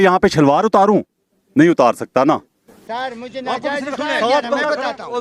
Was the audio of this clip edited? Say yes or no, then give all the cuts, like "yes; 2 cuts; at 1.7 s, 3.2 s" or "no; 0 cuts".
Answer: no; 0 cuts